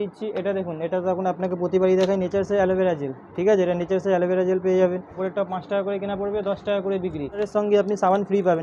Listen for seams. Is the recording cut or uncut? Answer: cut